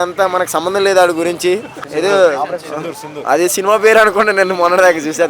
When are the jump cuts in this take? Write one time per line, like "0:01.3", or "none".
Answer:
0:01.8

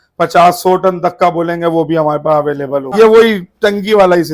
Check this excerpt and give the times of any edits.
0:02.9

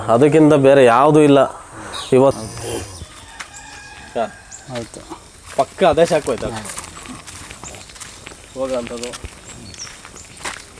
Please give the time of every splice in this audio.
0:02.3

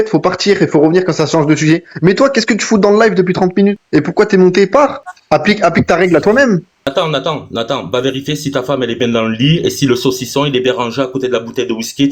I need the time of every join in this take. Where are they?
0:03.8
0:05.1
0:06.9

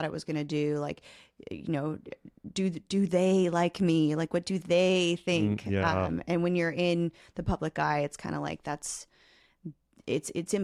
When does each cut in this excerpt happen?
none

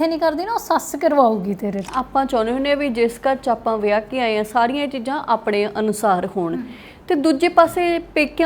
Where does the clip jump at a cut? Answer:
0:01.9

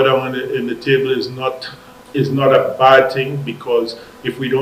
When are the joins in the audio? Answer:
none

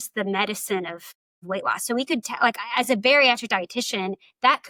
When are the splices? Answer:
none

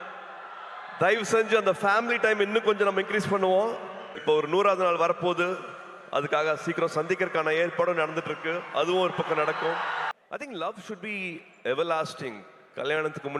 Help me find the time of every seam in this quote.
0:04.1
0:10.1

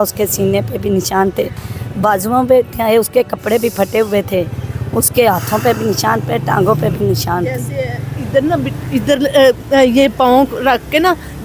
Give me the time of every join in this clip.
none

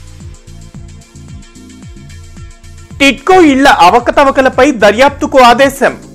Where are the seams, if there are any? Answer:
0:01.5

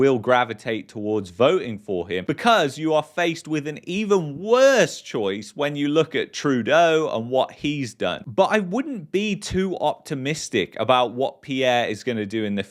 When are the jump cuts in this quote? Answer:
none

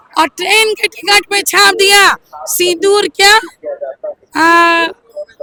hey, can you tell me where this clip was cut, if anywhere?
none

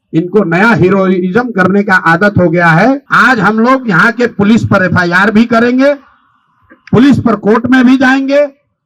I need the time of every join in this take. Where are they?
0:03.1

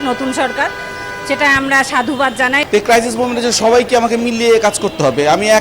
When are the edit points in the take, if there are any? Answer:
0:02.6

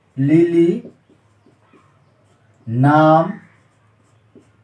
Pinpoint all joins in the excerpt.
none

